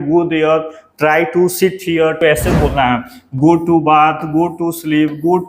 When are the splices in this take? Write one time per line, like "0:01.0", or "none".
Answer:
0:02.2